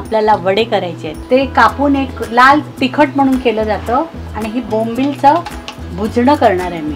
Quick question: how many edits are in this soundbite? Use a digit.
2